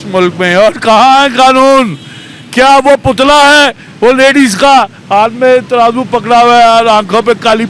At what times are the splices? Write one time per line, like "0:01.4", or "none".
none

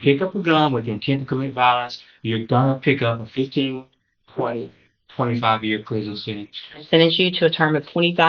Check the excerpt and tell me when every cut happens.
0:06.8

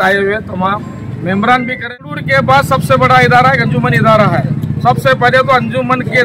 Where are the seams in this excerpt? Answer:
0:02.0

